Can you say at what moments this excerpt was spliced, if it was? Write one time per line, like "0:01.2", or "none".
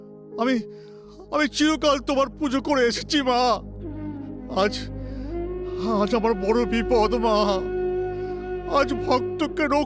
none